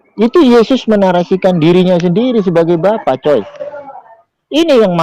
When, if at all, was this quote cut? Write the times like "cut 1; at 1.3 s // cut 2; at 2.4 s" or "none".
none

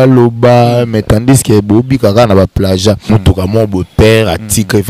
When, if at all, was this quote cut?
cut 1; at 3.0 s

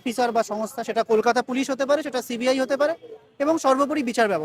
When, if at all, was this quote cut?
none

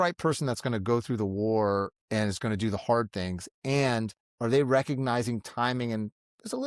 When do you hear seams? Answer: cut 1; at 2.0 s // cut 2; at 4.2 s

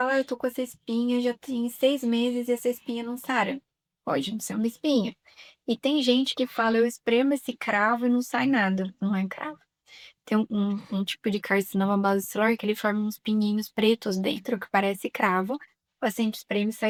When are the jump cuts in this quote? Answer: none

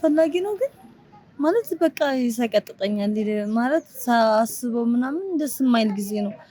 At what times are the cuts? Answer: none

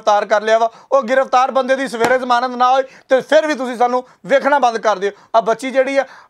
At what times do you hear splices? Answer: cut 1; at 5.2 s

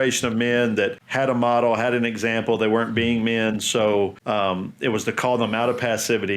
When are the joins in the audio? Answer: cut 1; at 1.0 s // cut 2; at 4.2 s

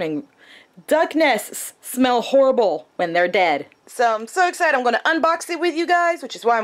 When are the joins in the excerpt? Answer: cut 1; at 3.8 s

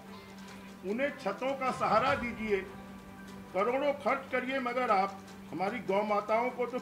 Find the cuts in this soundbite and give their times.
none

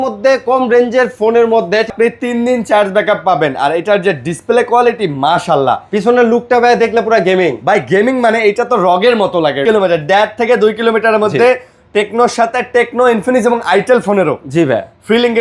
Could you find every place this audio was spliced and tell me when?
cut 1; at 1.9 s // cut 2; at 9.6 s

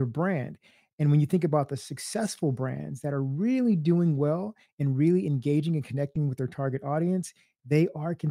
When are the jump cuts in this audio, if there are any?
none

